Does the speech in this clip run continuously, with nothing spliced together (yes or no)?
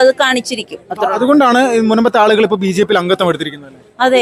yes